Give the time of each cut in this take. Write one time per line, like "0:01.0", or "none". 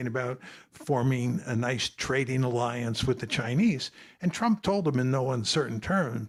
none